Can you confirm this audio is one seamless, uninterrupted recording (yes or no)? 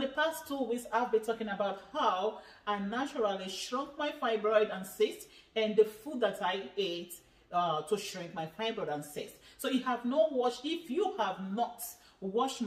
yes